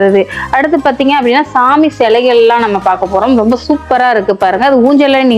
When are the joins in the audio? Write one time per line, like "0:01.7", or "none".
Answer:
none